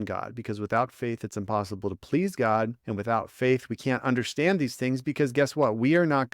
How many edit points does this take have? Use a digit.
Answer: 1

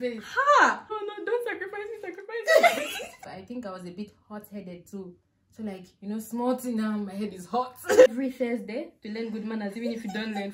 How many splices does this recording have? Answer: 3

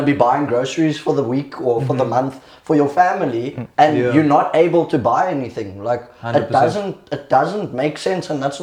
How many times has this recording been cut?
0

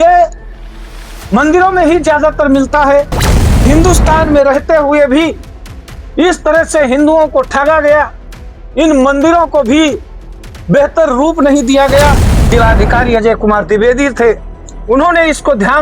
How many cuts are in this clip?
2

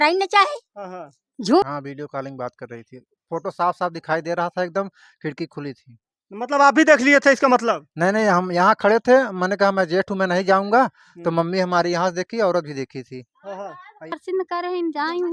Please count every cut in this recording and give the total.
2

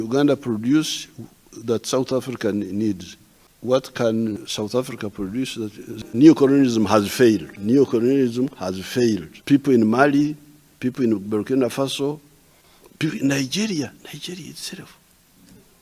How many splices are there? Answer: 1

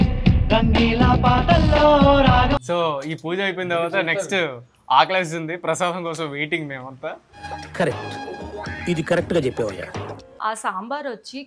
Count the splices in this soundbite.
2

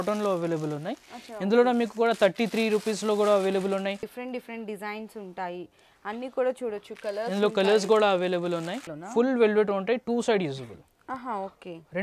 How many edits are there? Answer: 2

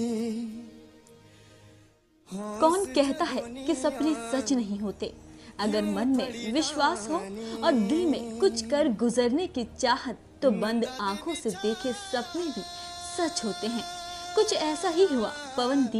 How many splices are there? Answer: 1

